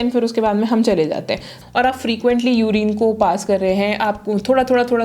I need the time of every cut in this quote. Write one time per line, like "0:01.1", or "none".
0:01.5